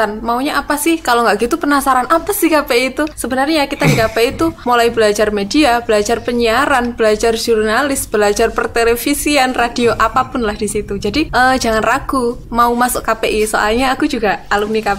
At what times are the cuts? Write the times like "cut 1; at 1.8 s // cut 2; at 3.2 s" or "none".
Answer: cut 1; at 3.2 s // cut 2; at 4.6 s // cut 3; at 11.3 s // cut 4; at 12.4 s